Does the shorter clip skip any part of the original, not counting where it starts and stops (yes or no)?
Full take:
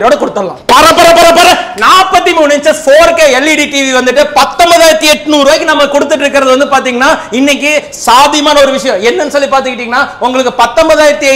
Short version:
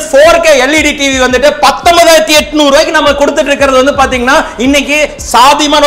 no